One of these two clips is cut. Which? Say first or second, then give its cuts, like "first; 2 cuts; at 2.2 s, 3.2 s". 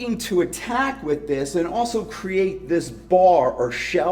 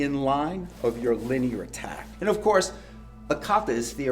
second; 2 cuts; at 2.0 s, 3.3 s